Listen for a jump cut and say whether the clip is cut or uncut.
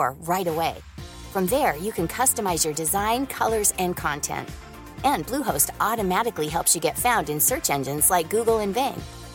uncut